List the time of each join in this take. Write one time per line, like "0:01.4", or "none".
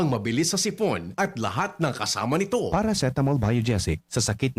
0:02.7